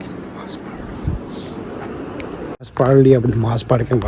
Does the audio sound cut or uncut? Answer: cut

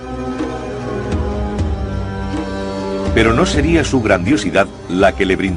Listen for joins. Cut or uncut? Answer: uncut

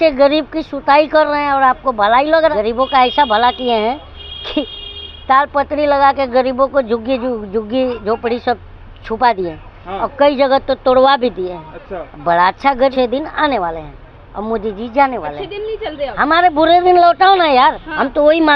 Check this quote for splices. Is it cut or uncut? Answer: cut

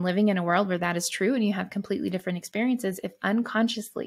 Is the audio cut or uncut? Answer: uncut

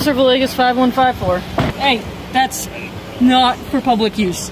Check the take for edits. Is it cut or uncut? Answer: cut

